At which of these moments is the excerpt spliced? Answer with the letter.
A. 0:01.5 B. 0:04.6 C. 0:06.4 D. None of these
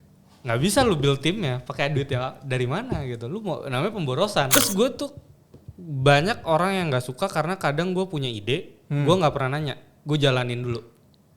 B